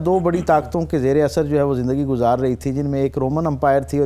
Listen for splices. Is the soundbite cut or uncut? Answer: uncut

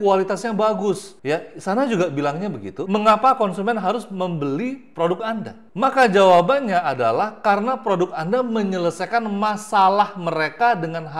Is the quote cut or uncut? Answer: cut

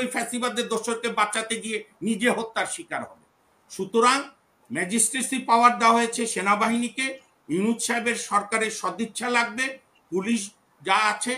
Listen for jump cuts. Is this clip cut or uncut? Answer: uncut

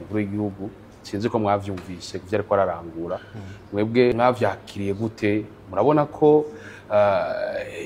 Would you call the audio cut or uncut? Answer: cut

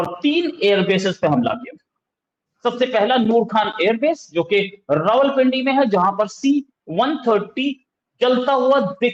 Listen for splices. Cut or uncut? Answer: uncut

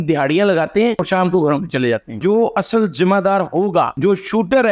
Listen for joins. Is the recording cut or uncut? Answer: cut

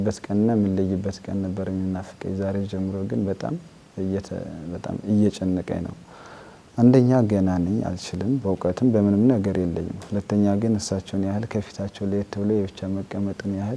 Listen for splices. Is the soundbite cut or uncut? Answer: uncut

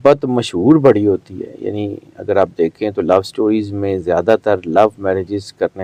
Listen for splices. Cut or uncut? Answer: uncut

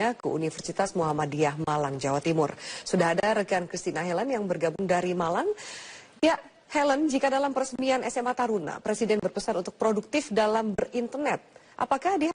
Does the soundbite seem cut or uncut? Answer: cut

